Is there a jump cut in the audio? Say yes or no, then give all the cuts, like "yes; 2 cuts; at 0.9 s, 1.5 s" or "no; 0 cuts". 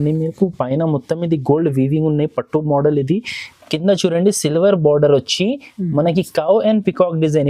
no; 0 cuts